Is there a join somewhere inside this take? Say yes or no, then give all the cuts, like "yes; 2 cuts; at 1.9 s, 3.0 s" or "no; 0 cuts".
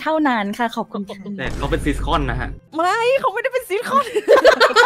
yes; 1 cut; at 2.5 s